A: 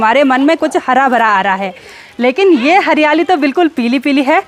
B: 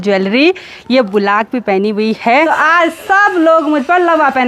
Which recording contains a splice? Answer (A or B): B